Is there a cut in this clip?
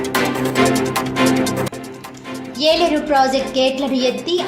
yes; 1 cut; at 1.5 s

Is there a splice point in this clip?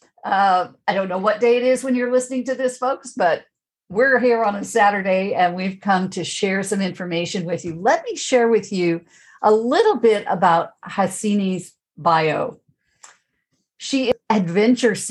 yes; 1 cut; at 14.1 s

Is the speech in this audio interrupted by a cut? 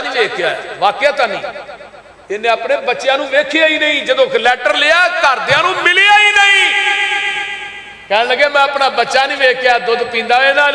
no; 0 cuts

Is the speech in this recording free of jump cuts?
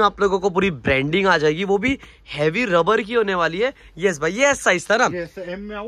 yes; 0 cuts

